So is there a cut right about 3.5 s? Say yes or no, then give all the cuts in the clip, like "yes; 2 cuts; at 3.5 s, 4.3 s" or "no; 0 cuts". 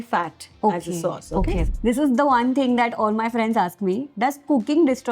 no; 1 cut; at 1.6 s